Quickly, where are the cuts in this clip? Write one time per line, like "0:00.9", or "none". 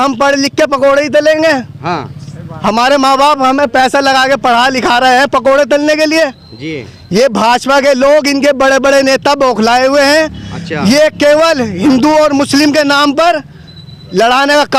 none

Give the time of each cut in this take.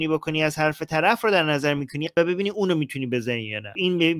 none

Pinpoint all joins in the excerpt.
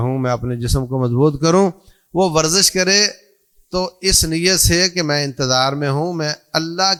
none

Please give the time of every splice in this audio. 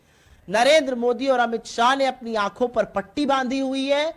none

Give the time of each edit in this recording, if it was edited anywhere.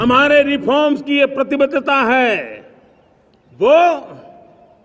none

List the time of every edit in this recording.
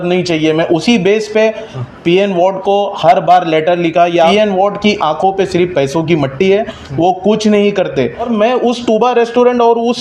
0:04.3
0:08.3

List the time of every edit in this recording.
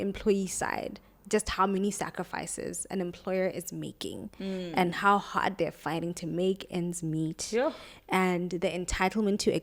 none

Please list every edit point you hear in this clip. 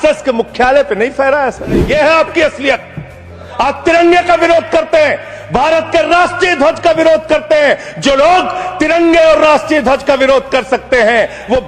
0:01.9

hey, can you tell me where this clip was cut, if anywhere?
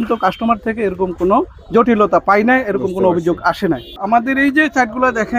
0:04.0

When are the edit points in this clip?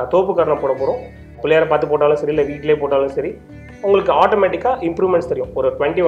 0:01.3

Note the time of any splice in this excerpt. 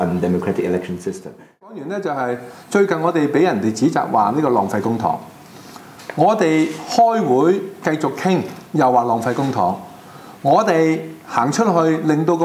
0:01.7

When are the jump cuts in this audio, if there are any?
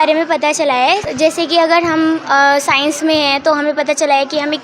0:01.1

